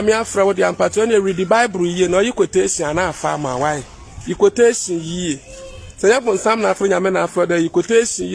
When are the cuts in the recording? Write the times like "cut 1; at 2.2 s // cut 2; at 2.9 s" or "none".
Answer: none